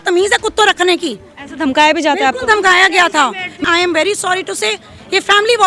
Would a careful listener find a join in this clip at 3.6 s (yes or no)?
yes